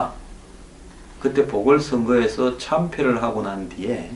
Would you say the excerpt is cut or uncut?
uncut